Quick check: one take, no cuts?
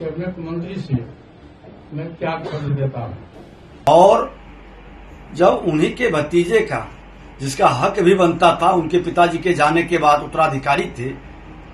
no; 1 cut; at 3.9 s

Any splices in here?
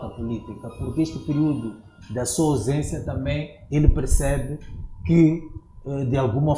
no; 0 cuts

